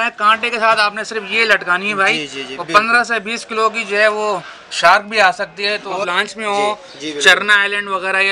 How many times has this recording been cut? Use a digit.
1